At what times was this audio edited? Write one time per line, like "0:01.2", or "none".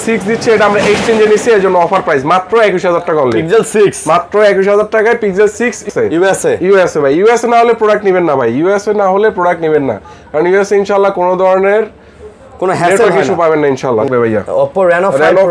0:05.9
0:14.1